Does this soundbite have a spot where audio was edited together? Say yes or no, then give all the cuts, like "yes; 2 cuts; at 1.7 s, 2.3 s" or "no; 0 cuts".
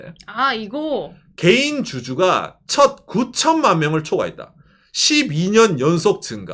no; 0 cuts